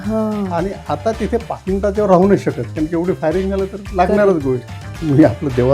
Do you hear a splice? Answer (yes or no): yes